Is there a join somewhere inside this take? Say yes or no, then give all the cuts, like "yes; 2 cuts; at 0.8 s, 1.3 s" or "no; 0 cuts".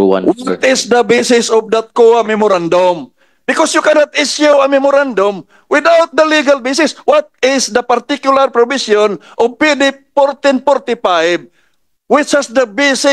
no; 0 cuts